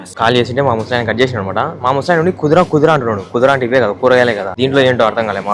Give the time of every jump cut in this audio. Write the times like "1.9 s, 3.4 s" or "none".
none